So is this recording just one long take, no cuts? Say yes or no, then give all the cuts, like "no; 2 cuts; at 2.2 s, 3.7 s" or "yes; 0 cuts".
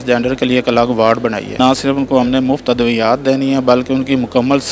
no; 1 cut; at 1.6 s